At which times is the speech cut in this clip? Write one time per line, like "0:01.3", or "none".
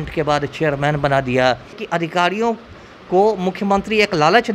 0:01.8